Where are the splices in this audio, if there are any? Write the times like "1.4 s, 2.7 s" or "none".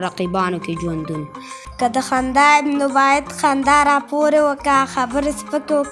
1.6 s